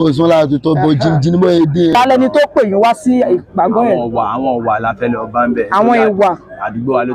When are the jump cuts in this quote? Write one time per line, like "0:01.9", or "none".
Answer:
0:01.9